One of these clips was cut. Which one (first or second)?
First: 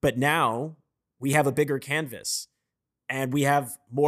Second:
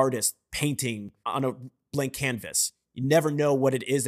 second